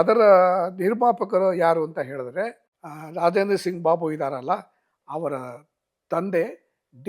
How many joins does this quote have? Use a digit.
0